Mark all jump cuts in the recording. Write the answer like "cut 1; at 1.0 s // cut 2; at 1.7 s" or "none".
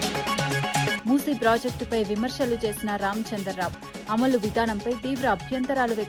none